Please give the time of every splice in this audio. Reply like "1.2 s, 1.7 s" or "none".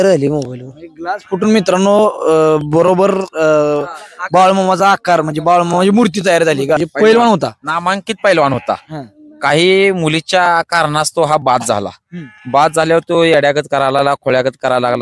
6.8 s